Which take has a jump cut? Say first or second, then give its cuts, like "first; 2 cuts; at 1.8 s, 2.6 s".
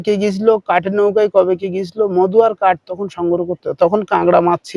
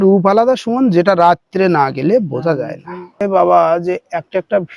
second; 1 cut; at 3.2 s